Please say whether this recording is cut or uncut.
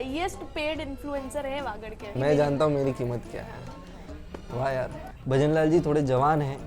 cut